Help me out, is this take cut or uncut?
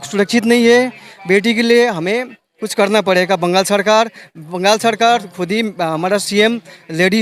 uncut